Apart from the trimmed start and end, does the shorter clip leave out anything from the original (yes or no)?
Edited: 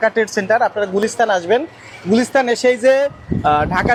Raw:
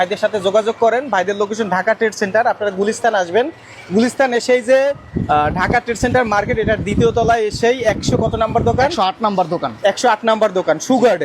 no